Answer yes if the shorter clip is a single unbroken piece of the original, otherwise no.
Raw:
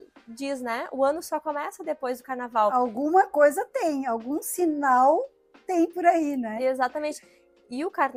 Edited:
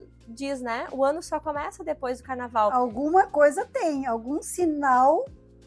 yes